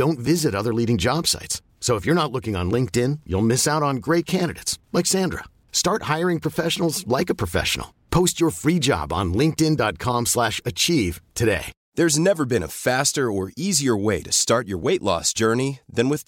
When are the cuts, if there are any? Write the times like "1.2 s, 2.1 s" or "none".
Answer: 11.8 s